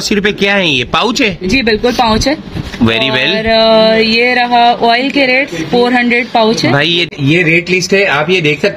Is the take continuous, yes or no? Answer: no